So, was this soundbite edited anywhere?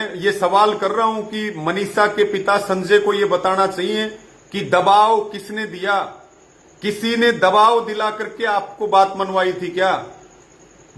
no; 0 cuts

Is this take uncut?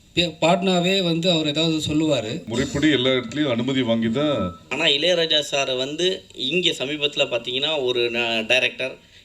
no; 2 cuts; at 2.4 s, 4.7 s

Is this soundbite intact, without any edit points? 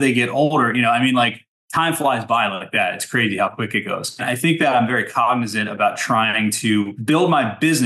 no; 2 cuts; at 4.2 s, 7.0 s

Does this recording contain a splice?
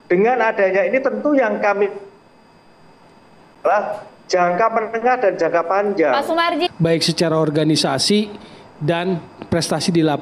yes; 1 cut; at 6.7 s

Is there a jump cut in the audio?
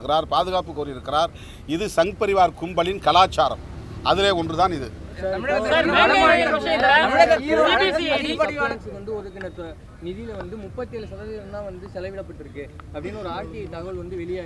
no; 0 cuts

